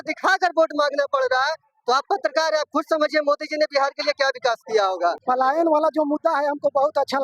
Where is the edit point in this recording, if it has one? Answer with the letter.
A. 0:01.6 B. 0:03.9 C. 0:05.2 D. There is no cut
C